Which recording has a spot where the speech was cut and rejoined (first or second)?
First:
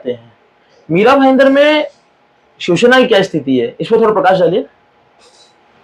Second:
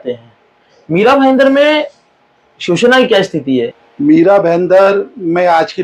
second